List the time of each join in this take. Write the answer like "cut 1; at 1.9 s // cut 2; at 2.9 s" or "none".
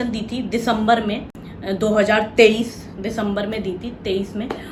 none